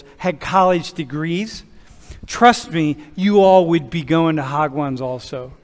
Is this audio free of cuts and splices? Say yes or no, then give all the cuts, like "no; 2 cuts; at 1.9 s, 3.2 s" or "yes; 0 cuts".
yes; 0 cuts